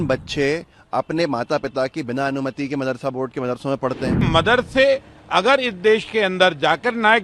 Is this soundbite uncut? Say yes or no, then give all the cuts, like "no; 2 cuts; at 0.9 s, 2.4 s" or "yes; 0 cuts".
no; 1 cut; at 4.3 s